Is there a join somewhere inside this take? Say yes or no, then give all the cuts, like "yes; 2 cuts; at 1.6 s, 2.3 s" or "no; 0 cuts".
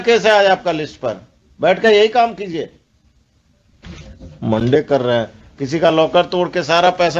no; 0 cuts